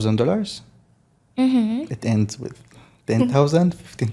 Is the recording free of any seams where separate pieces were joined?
yes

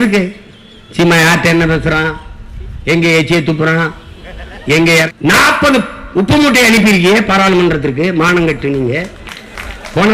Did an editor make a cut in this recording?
yes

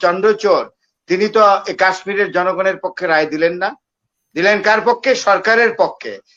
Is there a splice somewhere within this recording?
no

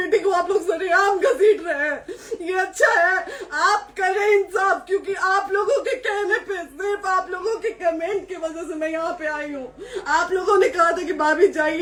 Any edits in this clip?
no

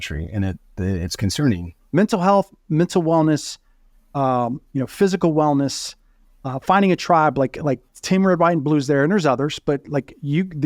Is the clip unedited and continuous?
no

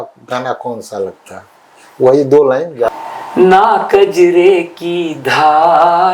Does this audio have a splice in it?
yes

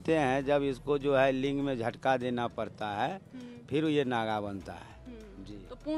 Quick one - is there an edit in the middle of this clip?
no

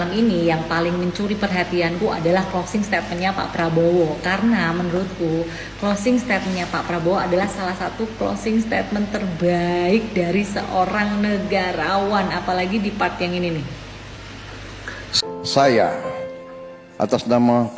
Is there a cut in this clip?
no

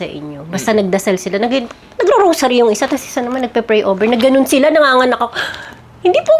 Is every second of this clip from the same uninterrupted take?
yes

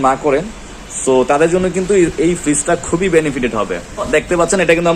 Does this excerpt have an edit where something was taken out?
yes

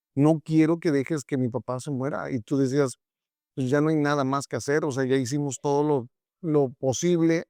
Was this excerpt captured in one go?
yes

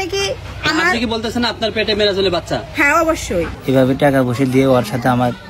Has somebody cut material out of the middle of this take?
yes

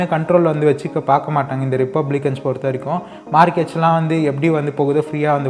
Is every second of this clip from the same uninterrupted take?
yes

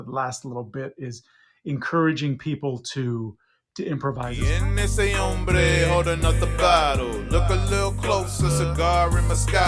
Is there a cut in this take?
yes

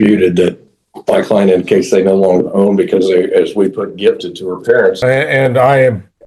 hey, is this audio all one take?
no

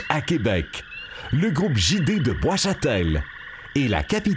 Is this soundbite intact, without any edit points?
yes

